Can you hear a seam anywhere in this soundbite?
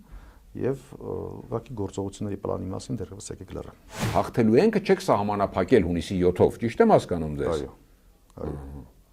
yes; 1 cut; at 4.1 s

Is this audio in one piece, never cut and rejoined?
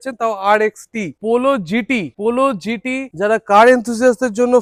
yes; 0 cuts

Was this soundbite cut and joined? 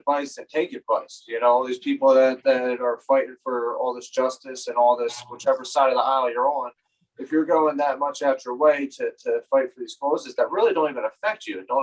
no; 0 cuts

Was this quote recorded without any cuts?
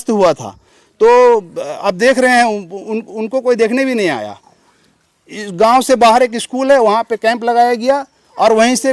yes; 0 cuts

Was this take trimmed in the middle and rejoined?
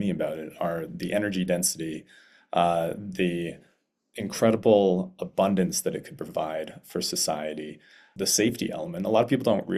yes; 1 cut; at 8.0 s

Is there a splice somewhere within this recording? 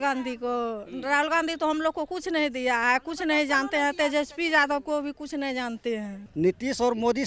yes; 1 cut; at 6.2 s

